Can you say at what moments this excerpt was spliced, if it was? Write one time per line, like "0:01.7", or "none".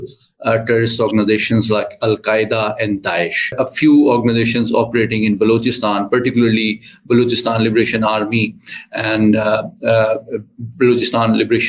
0:03.5